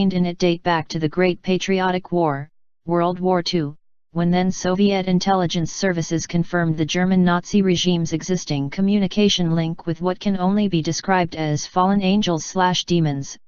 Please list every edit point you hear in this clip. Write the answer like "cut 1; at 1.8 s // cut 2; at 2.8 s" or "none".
cut 1; at 9.4 s

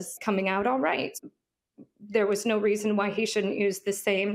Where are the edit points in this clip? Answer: cut 1; at 1.1 s

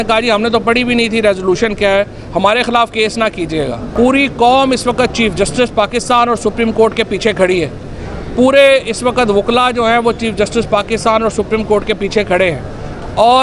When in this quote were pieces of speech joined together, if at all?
cut 1; at 3.8 s

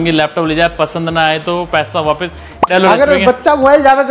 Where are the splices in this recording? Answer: cut 1; at 2.7 s

